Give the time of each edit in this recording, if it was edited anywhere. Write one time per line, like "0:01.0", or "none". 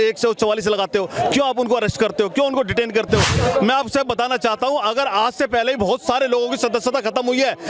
0:03.3